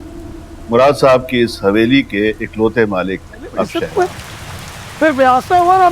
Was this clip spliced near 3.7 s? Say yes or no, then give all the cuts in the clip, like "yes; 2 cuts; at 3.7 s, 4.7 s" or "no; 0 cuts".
yes; 1 cut; at 3.7 s